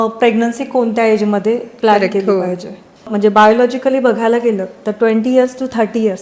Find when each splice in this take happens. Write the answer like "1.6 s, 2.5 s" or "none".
3.1 s